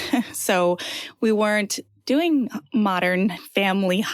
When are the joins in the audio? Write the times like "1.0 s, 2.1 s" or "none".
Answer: none